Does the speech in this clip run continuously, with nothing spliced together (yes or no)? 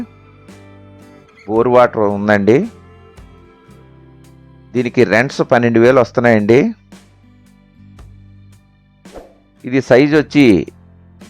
no